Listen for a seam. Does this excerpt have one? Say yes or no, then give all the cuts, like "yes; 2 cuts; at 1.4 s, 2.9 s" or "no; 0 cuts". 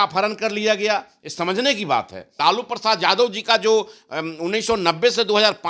yes; 1 cut; at 2.3 s